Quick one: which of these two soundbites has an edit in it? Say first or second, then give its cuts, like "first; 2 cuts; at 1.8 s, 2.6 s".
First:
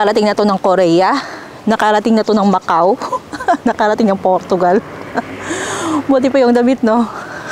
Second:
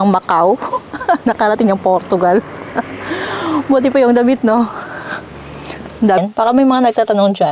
second; 1 cut; at 6.2 s